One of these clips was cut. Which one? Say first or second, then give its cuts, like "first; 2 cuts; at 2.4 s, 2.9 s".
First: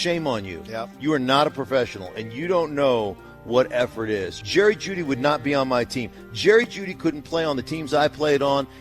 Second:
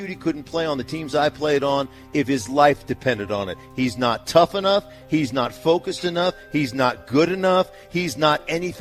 first; 1 cut; at 4.4 s